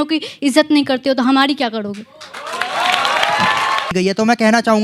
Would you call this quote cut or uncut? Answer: cut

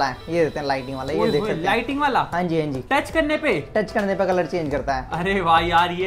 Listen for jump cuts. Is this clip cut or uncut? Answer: uncut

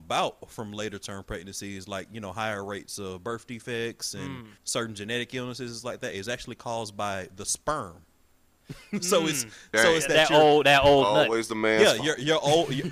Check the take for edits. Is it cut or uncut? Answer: cut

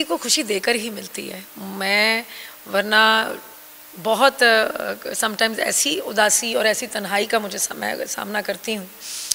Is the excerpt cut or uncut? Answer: uncut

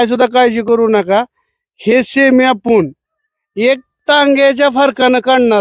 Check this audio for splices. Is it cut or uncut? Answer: uncut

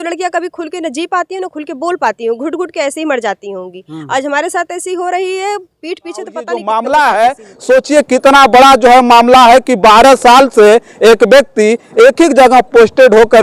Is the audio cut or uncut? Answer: cut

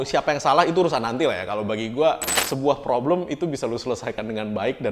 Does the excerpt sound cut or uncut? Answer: cut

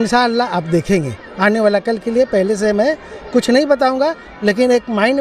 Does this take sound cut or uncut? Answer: uncut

